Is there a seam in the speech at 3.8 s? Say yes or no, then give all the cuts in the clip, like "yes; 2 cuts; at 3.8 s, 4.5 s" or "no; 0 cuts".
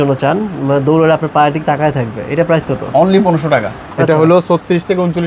yes; 1 cut; at 3.8 s